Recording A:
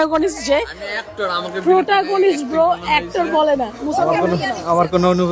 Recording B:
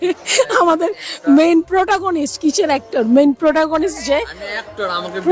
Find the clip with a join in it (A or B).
A